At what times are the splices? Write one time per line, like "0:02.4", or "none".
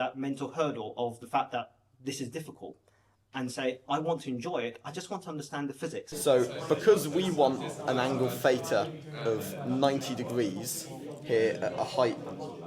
0:06.1